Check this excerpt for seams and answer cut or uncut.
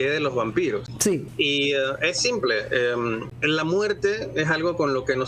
cut